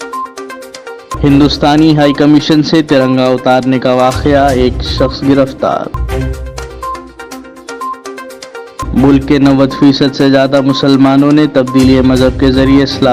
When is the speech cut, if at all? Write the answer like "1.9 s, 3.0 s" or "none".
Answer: 1.1 s